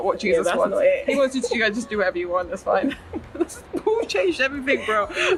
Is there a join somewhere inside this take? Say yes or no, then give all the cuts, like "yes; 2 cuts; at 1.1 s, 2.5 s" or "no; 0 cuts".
no; 0 cuts